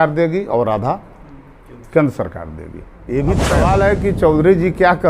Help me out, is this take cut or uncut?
cut